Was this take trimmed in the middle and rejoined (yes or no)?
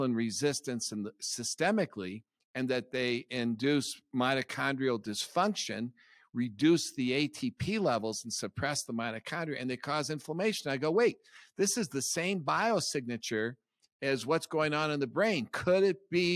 no